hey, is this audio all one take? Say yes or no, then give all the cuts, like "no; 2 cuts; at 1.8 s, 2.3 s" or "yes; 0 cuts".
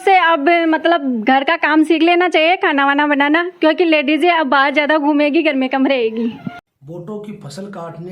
no; 1 cut; at 6.7 s